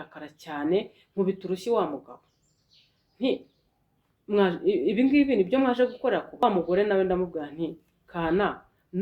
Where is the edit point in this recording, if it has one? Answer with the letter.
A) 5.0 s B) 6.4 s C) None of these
B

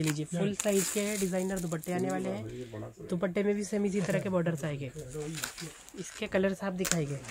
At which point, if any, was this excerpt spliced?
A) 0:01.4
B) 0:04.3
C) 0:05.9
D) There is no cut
D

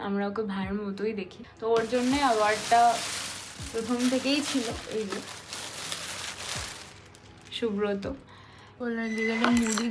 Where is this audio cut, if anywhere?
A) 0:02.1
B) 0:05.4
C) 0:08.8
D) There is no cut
C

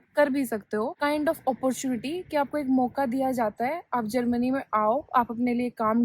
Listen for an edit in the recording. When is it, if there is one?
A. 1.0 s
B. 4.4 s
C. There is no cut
A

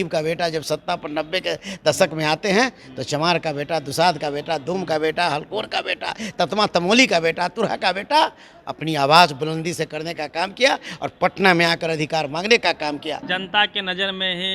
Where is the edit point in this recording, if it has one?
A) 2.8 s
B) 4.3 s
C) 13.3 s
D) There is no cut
C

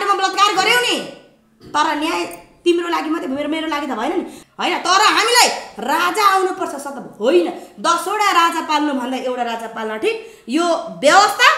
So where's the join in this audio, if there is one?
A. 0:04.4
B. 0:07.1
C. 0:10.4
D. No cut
A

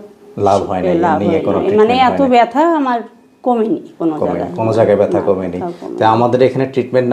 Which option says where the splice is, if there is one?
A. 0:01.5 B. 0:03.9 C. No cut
C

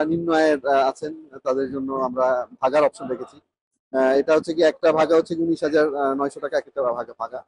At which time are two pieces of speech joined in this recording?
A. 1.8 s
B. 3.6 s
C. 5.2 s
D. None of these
D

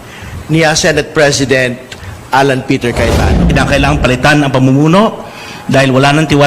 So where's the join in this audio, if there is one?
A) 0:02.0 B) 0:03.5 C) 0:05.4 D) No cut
B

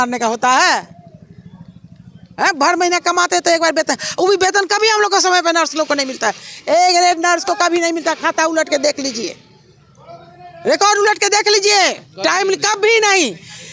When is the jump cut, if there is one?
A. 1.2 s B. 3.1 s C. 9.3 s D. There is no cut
D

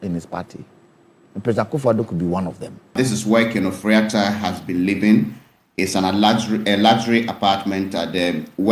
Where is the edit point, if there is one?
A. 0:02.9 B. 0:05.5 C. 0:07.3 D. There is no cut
A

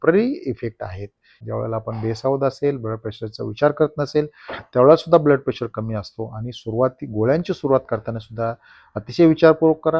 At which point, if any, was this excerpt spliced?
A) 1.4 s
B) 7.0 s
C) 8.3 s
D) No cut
A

